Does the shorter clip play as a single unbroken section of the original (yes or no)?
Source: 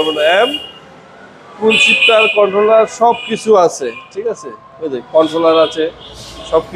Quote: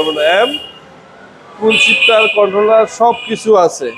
yes